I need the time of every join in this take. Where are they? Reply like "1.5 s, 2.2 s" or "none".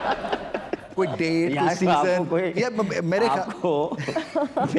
none